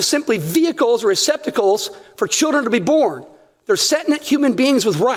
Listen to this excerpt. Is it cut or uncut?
uncut